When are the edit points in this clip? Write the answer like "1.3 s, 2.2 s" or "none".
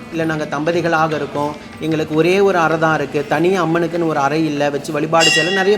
none